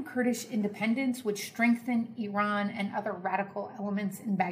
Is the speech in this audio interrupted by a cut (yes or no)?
no